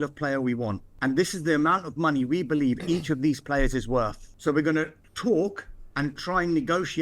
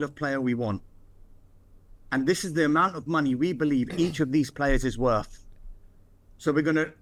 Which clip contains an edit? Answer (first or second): first